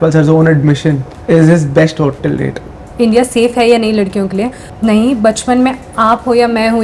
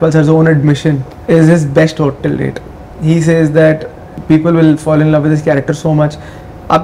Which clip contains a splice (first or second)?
first